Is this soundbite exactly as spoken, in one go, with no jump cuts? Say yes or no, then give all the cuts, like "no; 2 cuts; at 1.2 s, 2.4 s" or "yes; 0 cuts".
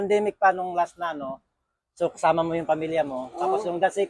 yes; 0 cuts